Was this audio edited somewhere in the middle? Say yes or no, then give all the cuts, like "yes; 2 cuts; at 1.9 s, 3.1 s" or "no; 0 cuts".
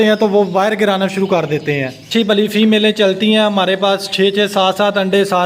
yes; 1 cut; at 2.0 s